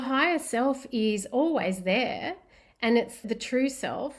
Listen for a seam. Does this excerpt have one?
no; 0 cuts

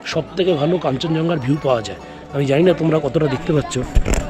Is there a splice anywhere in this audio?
no; 0 cuts

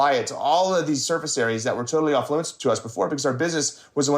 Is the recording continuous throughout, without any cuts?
no; 1 cut; at 2.5 s

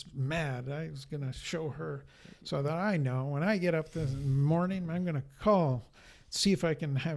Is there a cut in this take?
no; 0 cuts

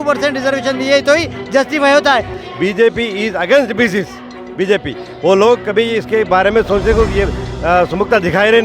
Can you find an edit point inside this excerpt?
yes; 1 cut; at 2.4 s

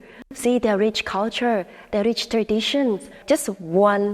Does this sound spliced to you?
yes; 1 cut; at 3.2 s

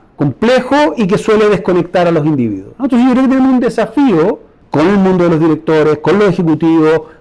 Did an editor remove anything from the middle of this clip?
yes; 1 cut; at 4.5 s

